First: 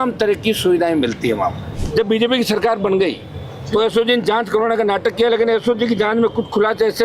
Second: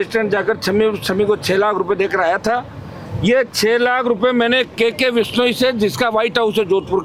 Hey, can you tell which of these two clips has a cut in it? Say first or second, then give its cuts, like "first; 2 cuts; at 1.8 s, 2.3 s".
first; 1 cut; at 1.7 s